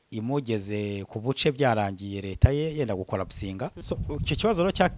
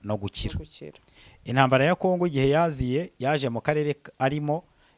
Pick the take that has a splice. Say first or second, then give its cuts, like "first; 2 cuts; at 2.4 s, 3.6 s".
first; 1 cut; at 3.8 s